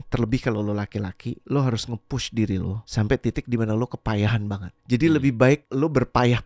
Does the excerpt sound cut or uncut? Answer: cut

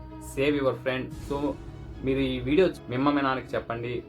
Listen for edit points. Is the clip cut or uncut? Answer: cut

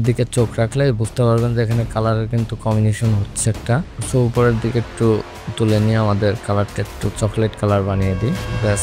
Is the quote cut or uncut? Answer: cut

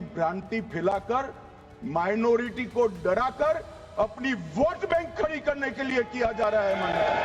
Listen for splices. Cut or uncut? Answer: uncut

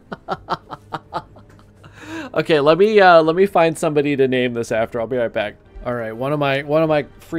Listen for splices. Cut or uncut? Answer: cut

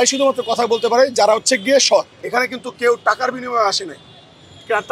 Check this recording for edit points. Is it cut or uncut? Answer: cut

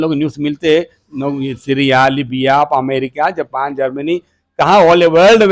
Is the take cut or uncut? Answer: uncut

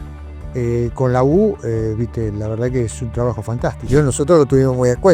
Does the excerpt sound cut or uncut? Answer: cut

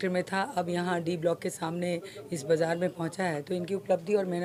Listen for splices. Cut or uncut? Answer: uncut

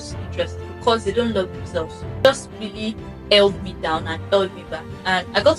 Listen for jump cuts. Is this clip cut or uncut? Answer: cut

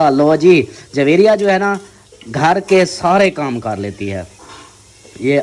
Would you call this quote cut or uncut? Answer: uncut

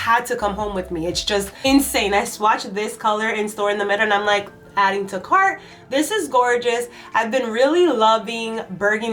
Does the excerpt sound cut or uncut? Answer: uncut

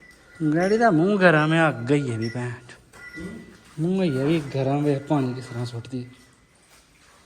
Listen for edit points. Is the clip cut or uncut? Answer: uncut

